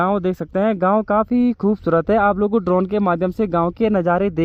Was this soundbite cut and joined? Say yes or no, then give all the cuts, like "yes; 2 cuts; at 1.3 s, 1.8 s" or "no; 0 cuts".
no; 0 cuts